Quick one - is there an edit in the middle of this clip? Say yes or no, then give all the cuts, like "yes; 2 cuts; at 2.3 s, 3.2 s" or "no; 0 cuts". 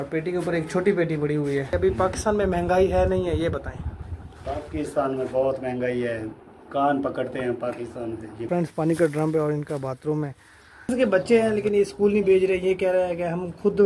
yes; 3 cuts; at 1.7 s, 8.4 s, 10.9 s